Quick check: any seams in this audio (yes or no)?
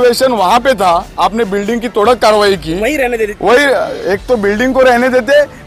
no